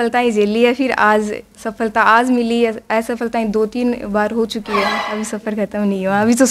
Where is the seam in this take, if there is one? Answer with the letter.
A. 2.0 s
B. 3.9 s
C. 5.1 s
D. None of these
C